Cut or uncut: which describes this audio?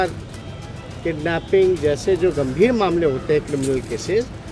uncut